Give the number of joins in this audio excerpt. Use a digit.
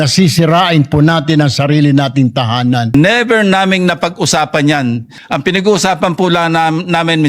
2